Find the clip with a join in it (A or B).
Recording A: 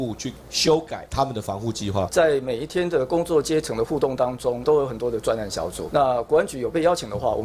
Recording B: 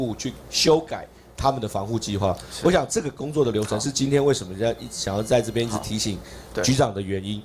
A